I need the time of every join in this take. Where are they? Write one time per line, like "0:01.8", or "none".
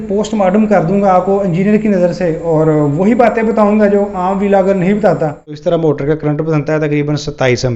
0:05.6